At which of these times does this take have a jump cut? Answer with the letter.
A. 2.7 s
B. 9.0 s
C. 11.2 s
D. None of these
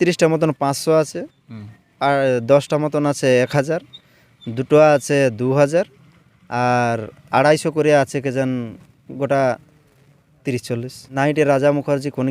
C